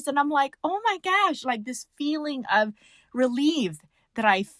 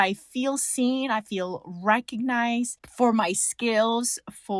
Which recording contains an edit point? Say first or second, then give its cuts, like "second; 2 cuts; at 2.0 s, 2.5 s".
second; 1 cut; at 2.8 s